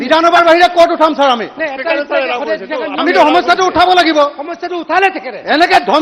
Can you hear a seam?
no; 0 cuts

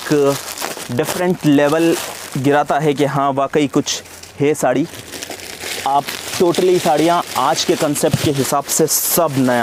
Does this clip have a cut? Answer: no; 0 cuts

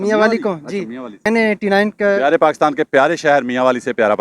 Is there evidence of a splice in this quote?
yes; 1 cut; at 1.2 s

